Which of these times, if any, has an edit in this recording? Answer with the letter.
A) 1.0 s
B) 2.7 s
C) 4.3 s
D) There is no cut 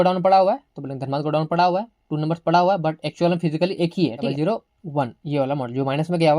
C